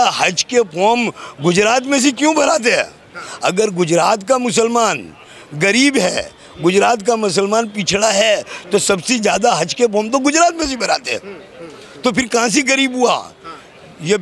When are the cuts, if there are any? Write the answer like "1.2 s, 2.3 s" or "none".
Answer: none

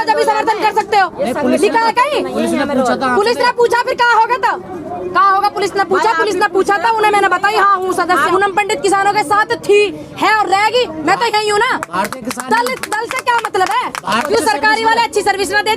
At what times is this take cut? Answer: 8.1 s, 14.3 s

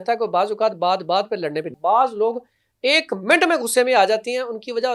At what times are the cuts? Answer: 1.7 s

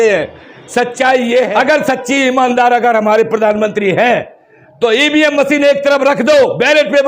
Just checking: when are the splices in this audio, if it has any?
1.5 s

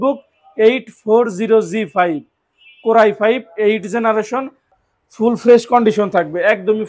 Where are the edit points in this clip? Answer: 4.7 s

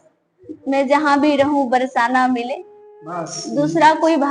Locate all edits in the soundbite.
none

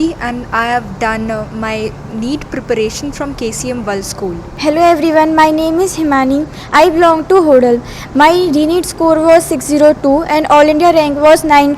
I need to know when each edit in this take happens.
4.5 s

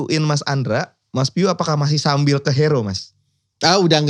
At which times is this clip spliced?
none

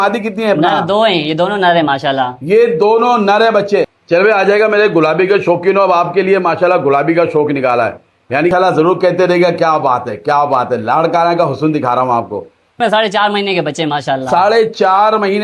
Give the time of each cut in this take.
4.0 s, 8.5 s, 12.8 s

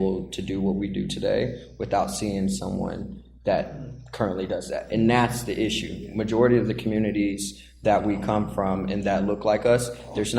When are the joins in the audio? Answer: none

